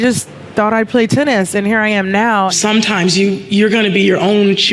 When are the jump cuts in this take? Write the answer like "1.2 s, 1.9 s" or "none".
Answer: 2.5 s